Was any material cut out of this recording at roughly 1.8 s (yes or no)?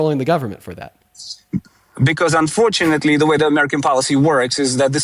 yes